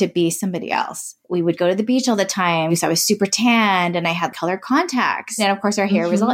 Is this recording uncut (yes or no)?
no